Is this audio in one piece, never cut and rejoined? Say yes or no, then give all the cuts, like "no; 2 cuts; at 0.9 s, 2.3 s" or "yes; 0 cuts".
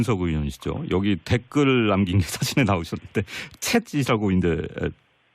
no; 1 cut; at 1.6 s